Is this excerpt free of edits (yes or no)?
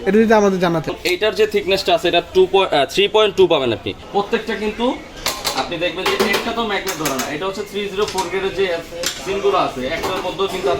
no